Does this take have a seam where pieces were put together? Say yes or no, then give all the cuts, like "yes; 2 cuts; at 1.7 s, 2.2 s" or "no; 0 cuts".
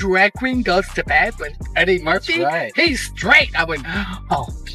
no; 0 cuts